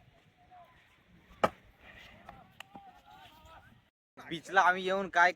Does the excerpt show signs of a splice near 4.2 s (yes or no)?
yes